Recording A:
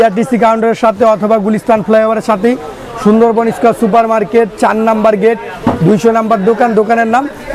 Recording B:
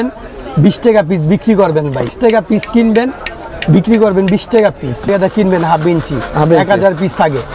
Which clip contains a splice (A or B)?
B